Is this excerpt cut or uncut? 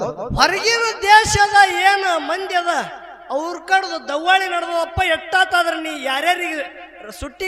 uncut